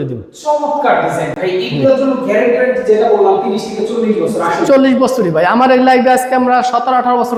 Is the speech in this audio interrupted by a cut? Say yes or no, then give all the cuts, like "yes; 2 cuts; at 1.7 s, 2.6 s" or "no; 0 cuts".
no; 0 cuts